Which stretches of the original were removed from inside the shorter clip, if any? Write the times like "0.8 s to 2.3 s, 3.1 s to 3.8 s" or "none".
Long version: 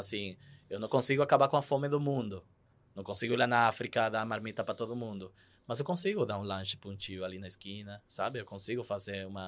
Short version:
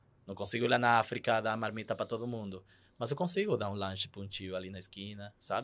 none